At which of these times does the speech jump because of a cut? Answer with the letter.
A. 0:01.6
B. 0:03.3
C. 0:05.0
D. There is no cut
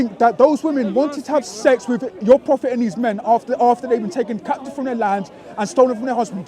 D